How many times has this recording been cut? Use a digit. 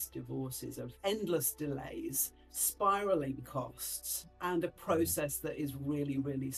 0